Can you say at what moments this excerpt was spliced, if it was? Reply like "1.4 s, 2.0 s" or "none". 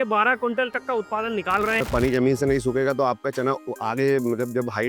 1.8 s, 3.7 s